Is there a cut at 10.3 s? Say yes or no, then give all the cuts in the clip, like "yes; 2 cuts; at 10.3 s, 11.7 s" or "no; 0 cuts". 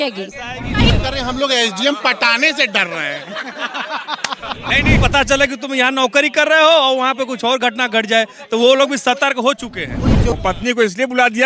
yes; 3 cuts; at 0.9 s, 5.0 s, 10.3 s